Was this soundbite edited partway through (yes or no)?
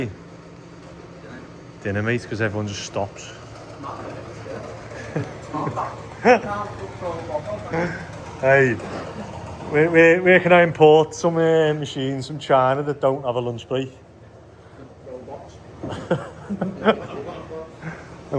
no